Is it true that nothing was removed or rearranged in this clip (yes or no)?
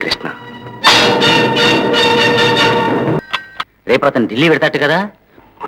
no